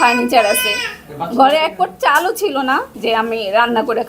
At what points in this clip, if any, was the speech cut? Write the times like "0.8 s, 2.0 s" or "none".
2.9 s